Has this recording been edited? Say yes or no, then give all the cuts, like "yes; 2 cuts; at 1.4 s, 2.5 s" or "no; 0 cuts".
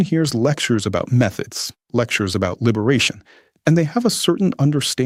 no; 0 cuts